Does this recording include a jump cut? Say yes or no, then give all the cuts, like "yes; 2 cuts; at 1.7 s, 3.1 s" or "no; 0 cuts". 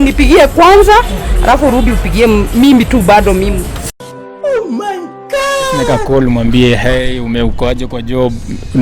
yes; 1 cut; at 5.9 s